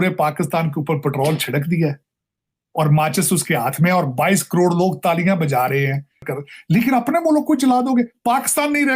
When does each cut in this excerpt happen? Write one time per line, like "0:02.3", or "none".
0:06.3